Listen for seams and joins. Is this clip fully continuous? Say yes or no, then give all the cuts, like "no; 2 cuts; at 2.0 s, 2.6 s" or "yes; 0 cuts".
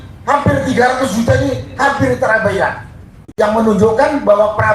no; 1 cut; at 3.2 s